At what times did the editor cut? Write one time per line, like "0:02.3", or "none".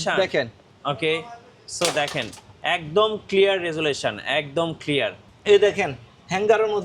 0:05.2